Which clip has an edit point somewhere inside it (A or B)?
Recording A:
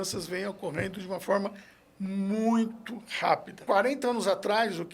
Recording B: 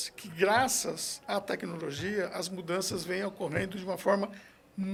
A